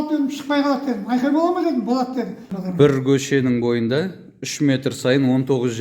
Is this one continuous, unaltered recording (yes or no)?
no